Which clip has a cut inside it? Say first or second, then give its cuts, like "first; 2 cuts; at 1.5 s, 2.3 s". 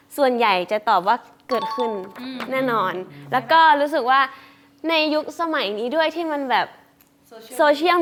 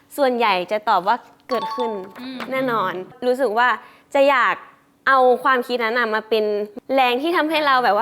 second; 1 cut; at 3.1 s